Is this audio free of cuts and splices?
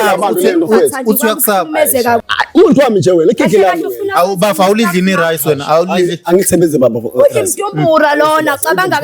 no; 1 cut; at 2.2 s

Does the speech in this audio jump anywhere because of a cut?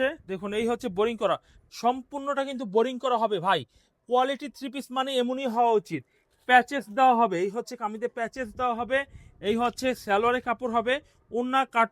no; 0 cuts

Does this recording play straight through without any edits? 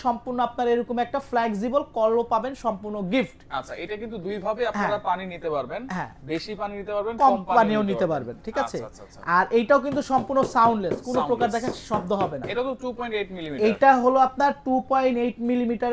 yes; 0 cuts

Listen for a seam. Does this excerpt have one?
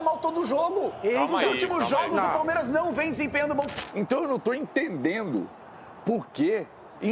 yes; 1 cut; at 3.8 s

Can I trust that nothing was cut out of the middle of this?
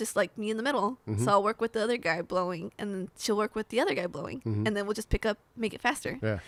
yes; 0 cuts

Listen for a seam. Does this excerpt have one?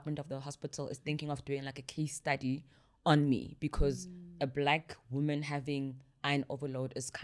no; 0 cuts

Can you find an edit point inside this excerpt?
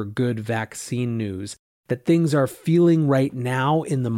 no; 0 cuts

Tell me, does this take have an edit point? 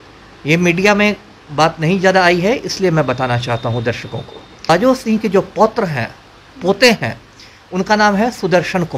yes; 1 cut; at 4.7 s

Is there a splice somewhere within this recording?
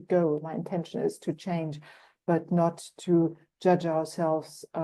no; 0 cuts

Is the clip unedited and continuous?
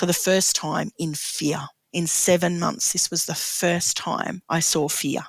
no; 2 cuts; at 1.8 s, 4.4 s

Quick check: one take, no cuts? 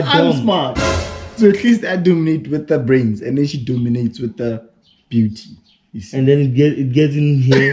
yes; 0 cuts

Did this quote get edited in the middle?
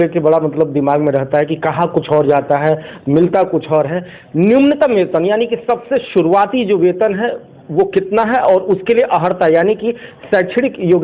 no; 0 cuts

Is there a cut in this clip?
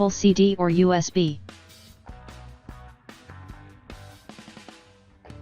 yes; 1 cut; at 1.4 s

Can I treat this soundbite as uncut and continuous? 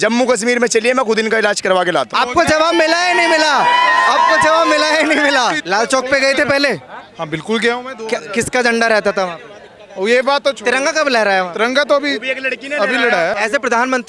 no; 3 cuts; at 2.1 s, 5.6 s, 13.4 s

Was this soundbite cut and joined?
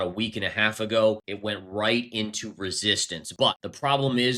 yes; 2 cuts; at 1.3 s, 3.5 s

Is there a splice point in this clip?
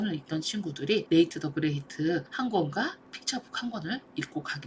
yes; 3 cuts; at 1.0 s, 2.3 s, 3.1 s

